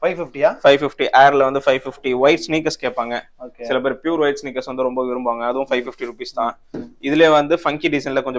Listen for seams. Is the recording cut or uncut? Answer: uncut